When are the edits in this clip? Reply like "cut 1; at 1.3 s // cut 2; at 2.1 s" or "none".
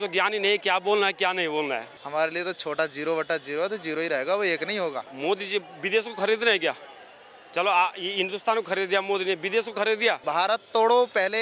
cut 1; at 1.9 s // cut 2; at 5.1 s // cut 3; at 10.2 s

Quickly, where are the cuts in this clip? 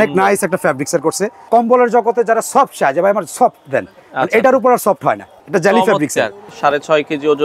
cut 1; at 1.4 s // cut 2; at 5.3 s // cut 3; at 6.5 s

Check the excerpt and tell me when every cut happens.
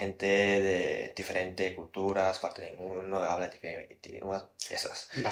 none

